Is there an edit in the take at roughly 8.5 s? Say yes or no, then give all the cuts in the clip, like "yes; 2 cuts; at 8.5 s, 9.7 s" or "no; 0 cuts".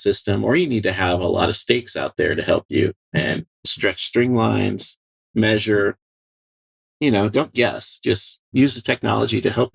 yes; 1 cut; at 8.5 s